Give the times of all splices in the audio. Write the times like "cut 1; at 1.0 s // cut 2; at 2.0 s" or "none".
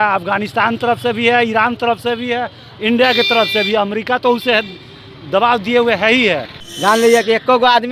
cut 1; at 6.6 s